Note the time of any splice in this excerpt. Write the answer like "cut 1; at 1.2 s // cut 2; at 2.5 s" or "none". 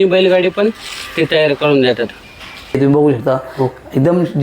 cut 1; at 2.8 s